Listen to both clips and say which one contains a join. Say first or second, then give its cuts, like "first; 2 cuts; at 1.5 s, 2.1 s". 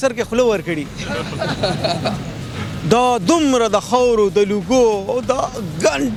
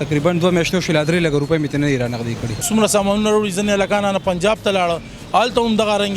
second; 1 cut; at 2.7 s